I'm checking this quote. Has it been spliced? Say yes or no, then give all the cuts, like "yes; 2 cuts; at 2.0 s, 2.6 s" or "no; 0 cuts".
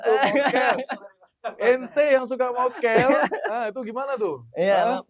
no; 0 cuts